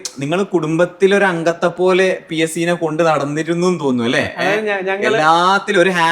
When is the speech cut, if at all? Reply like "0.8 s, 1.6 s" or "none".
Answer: none